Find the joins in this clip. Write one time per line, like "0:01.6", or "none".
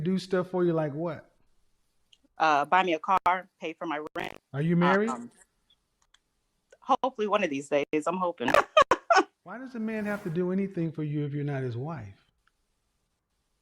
0:09.7

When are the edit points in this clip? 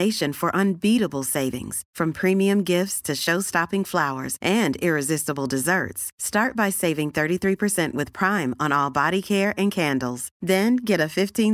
none

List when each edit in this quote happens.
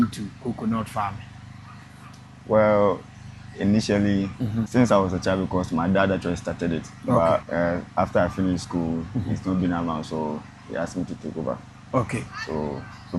0:04.7
0:07.5

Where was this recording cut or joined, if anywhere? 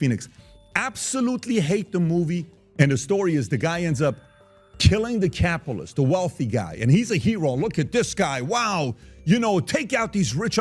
0:02.6

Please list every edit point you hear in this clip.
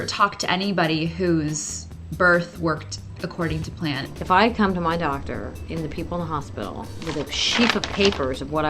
0:04.0

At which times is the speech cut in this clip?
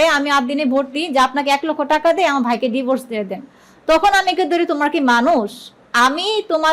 none

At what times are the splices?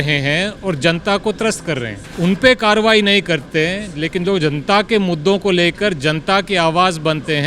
0:02.0

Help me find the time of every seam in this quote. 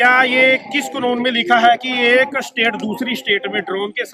none

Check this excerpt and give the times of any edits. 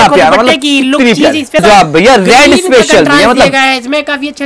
0:01.6

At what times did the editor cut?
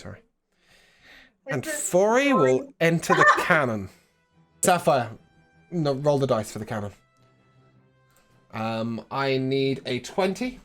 0:04.6

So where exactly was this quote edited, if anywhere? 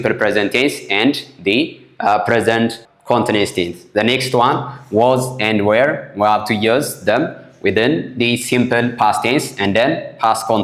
none

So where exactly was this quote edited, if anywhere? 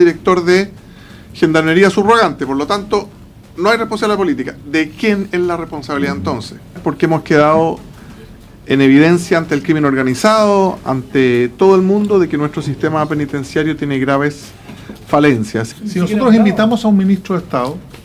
0:06.8
0:15.7

